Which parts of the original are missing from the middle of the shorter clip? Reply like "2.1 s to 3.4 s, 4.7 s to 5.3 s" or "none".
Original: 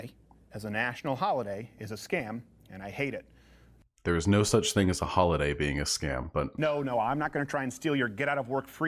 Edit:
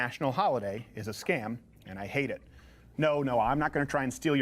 3.8 s to 6.5 s